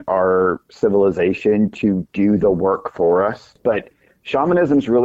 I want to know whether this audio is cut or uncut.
cut